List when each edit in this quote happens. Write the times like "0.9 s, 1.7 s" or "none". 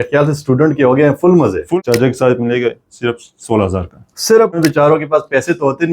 1.7 s, 4.5 s